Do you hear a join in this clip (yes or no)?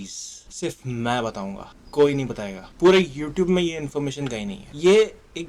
no